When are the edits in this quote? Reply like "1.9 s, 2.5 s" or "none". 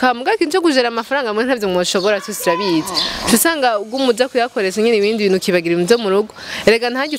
none